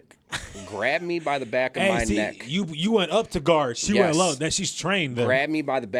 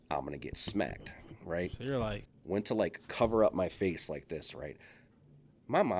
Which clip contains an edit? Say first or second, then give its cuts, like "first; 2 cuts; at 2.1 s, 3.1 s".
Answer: second; 1 cut; at 2.3 s